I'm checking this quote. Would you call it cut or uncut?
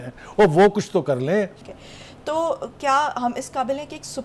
cut